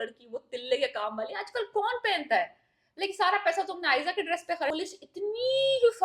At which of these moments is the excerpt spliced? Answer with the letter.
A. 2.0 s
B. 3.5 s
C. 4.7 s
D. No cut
C